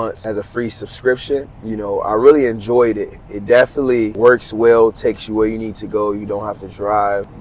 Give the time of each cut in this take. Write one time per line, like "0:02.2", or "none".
none